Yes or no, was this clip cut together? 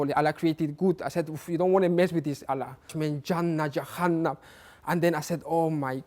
yes